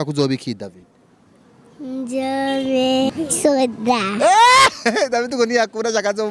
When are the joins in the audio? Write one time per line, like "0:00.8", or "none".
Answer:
0:03.1